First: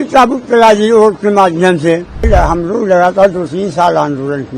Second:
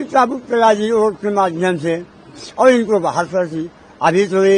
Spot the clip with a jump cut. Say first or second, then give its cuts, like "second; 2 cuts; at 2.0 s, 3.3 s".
first; 1 cut; at 2.2 s